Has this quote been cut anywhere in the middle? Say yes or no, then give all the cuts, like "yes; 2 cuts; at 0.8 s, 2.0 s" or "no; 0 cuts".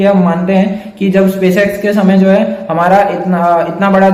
no; 0 cuts